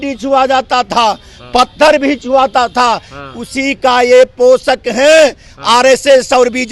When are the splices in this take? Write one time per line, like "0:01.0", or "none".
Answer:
none